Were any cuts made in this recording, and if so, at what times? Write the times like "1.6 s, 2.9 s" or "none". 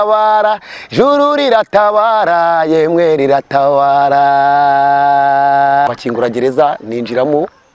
5.9 s